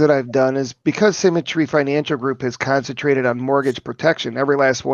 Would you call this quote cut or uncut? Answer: uncut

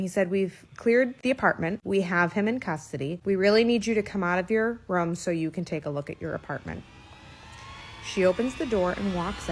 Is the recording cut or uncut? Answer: uncut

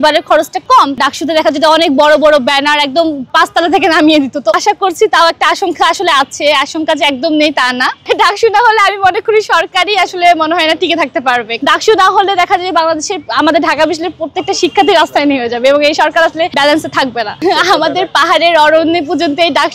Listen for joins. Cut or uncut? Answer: cut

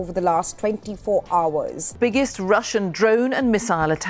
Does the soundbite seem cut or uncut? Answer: cut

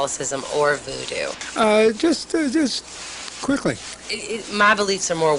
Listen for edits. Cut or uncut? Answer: cut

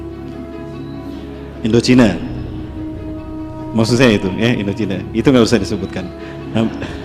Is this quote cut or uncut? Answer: cut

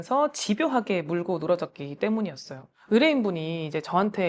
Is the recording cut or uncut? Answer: uncut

